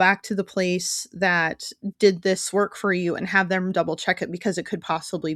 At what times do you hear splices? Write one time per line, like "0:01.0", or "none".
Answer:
none